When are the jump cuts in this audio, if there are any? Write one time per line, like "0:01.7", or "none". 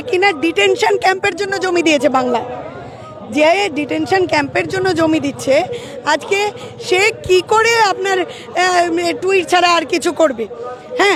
none